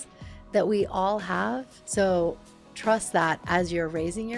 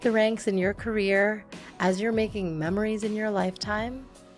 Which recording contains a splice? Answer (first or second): first